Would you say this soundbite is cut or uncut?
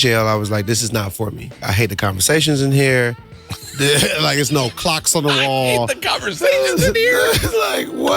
cut